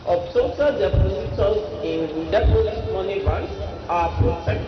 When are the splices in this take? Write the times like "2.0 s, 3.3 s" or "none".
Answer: 3.7 s